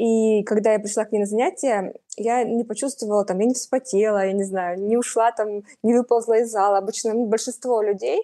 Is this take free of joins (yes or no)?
yes